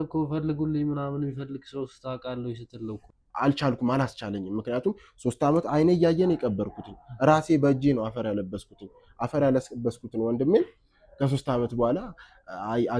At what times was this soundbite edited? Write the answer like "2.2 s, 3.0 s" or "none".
3.0 s

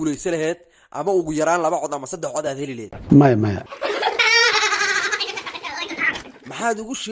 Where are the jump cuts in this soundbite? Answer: none

